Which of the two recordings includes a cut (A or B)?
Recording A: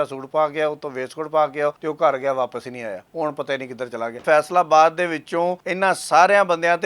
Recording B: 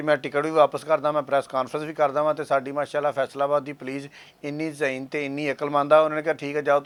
A